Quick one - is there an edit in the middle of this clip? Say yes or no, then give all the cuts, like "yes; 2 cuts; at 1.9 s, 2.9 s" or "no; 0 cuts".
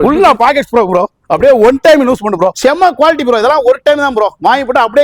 yes; 1 cut; at 2.6 s